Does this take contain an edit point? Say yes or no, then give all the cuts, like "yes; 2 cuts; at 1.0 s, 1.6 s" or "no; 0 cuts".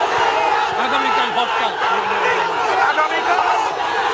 no; 0 cuts